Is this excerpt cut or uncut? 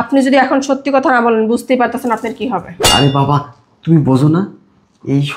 cut